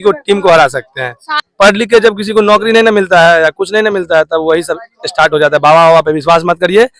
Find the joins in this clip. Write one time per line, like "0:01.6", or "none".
0:01.4